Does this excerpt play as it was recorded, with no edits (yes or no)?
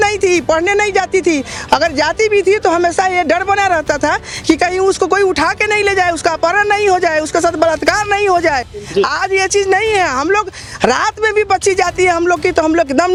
yes